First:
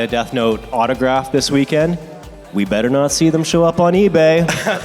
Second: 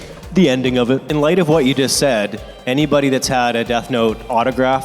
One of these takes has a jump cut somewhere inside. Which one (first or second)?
second